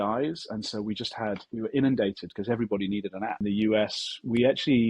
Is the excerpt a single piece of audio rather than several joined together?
no; 1 cut; at 3.4 s

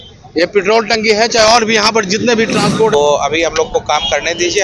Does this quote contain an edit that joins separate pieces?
yes; 1 cut; at 2.9 s

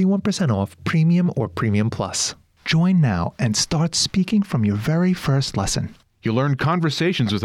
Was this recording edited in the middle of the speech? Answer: yes; 1 cut; at 2.3 s

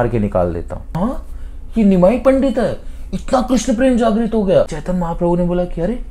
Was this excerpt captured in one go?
no; 2 cuts; at 0.9 s, 4.8 s

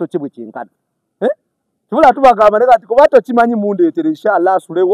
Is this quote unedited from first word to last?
yes; 0 cuts

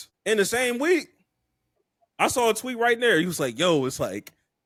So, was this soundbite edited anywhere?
no; 0 cuts

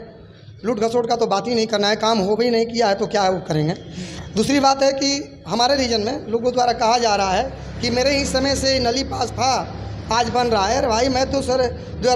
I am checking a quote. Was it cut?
no; 0 cuts

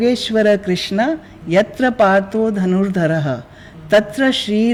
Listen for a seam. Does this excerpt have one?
no; 0 cuts

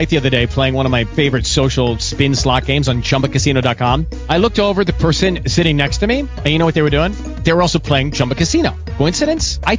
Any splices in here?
no; 0 cuts

